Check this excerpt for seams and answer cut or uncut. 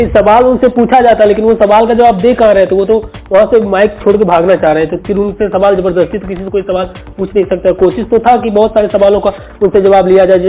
uncut